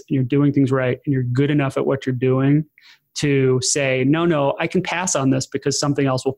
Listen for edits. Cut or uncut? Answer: uncut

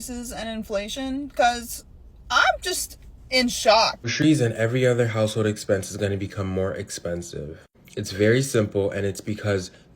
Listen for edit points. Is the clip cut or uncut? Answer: cut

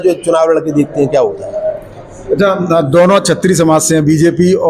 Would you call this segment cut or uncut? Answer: uncut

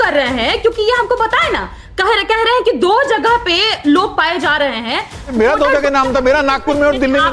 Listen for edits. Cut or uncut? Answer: cut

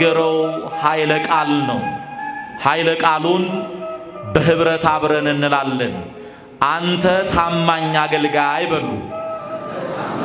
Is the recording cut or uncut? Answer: uncut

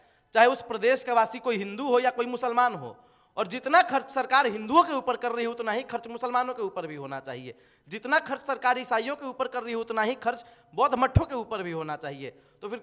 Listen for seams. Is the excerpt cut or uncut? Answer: uncut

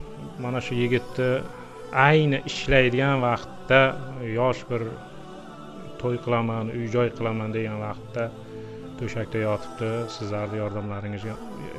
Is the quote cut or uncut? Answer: uncut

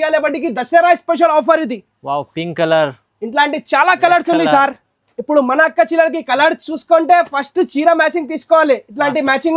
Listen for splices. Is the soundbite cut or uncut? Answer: uncut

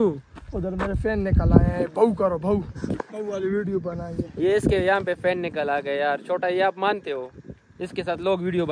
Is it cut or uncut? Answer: uncut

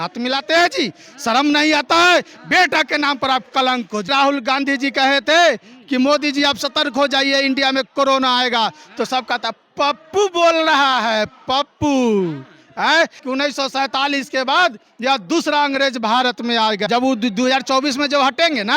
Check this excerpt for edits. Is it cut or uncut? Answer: cut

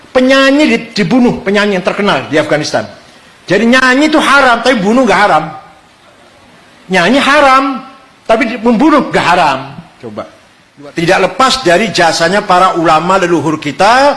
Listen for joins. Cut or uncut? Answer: cut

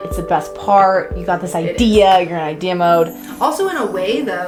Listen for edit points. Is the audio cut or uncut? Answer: uncut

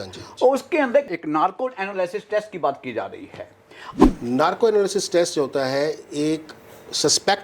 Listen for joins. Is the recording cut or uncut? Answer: cut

